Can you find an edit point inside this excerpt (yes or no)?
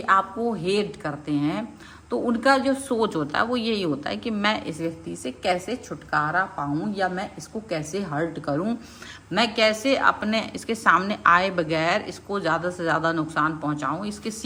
no